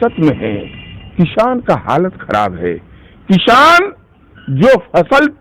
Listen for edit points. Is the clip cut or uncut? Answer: uncut